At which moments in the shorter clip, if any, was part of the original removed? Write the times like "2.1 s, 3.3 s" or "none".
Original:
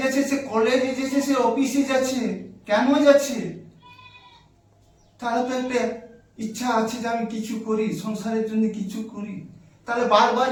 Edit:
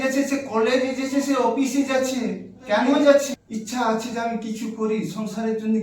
3.3 s